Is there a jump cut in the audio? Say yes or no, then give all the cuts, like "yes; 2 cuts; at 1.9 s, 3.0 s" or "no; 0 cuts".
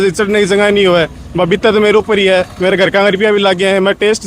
no; 0 cuts